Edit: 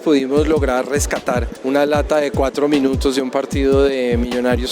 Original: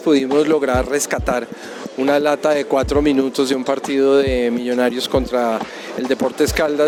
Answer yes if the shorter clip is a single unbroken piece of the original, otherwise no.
no